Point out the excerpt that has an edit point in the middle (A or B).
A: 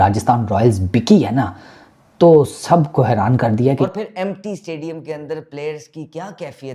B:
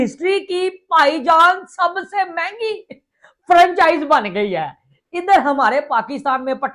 A